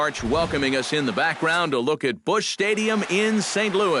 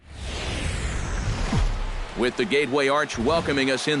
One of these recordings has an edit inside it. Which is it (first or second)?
second